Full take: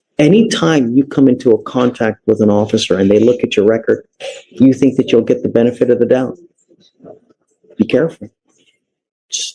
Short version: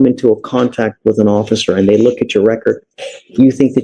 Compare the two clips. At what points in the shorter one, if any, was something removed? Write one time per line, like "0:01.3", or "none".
none